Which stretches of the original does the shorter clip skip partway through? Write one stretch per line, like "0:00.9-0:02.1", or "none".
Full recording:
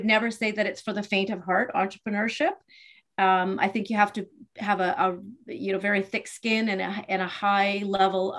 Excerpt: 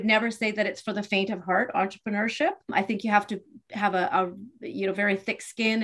0:02.7-0:03.5